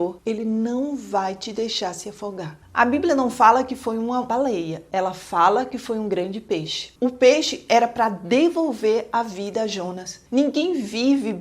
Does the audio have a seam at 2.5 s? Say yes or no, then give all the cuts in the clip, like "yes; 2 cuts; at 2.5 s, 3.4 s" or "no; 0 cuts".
yes; 2 cuts; at 2.5 s, 6.9 s